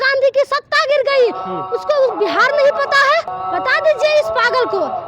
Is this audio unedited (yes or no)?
no